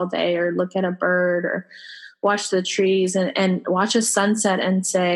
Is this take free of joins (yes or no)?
yes